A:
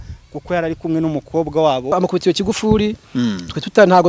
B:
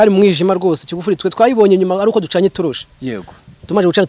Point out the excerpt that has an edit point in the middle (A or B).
A